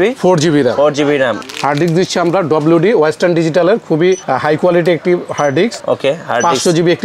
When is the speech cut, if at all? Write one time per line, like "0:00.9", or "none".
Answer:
0:01.4
0:04.2
0:05.8